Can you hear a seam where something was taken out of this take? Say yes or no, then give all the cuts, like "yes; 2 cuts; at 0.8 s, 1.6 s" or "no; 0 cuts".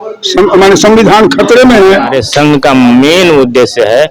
yes; 1 cut; at 2.2 s